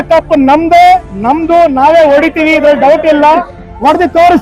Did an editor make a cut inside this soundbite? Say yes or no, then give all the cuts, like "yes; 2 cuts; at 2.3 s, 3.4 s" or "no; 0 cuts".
no; 0 cuts